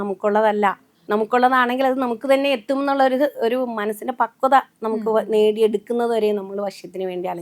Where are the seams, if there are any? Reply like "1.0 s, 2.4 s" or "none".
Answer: 0.9 s